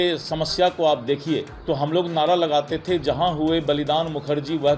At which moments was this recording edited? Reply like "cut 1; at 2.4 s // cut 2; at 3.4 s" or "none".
cut 1; at 1.5 s